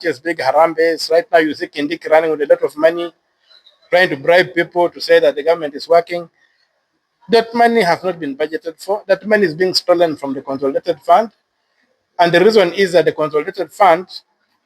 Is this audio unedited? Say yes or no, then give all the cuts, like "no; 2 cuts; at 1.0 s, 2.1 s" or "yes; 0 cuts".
yes; 0 cuts